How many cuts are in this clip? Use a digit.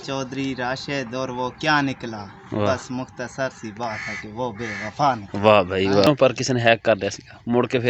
1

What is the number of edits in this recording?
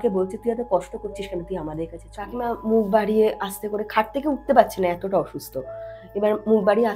1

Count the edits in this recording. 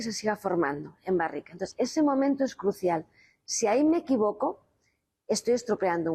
0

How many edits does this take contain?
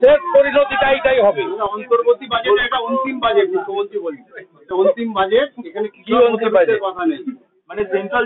0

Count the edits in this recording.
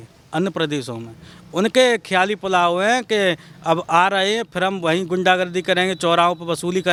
0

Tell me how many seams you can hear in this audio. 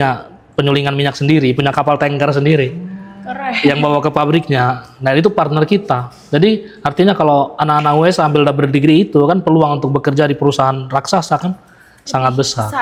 0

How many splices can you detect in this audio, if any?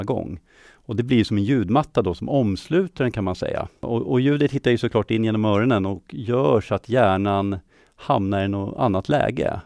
1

